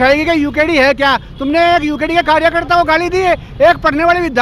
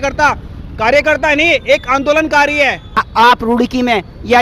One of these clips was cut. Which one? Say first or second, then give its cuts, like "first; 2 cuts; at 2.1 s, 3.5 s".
second; 1 cut; at 3.0 s